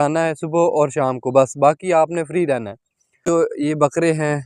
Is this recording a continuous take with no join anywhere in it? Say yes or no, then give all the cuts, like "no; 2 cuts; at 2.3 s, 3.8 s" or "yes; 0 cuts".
no; 1 cut; at 3.2 s